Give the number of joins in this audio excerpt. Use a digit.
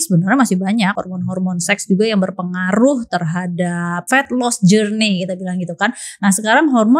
2